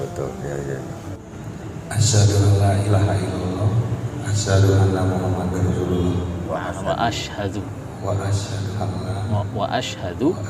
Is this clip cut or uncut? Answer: cut